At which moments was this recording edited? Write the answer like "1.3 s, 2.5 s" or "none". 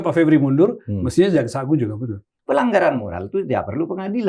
2.3 s